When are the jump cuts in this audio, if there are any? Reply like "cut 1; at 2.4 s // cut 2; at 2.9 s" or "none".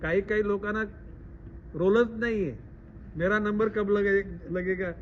none